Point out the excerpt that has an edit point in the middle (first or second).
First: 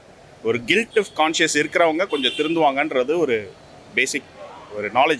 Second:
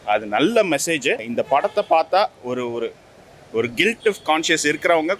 second